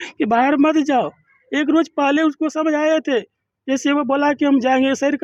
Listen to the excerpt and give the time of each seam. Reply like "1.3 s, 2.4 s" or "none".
none